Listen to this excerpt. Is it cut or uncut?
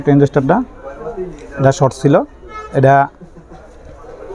uncut